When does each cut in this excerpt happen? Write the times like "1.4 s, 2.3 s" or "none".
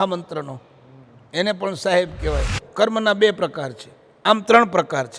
2.6 s